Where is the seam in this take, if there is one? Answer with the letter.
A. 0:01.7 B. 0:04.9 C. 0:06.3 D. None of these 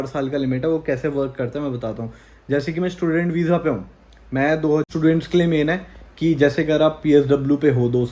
B